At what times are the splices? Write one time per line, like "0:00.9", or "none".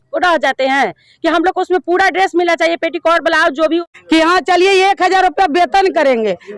0:03.8